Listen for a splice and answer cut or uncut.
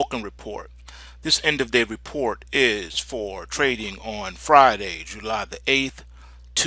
uncut